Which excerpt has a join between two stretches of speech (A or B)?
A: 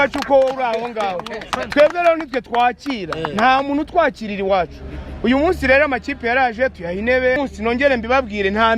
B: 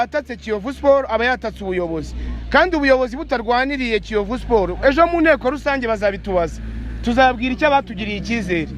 A